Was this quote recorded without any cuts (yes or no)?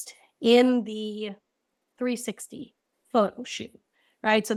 yes